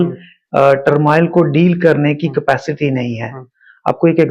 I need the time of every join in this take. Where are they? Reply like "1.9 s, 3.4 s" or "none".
none